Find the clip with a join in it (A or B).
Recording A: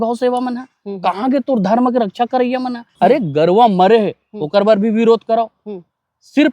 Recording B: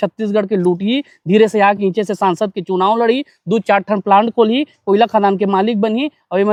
A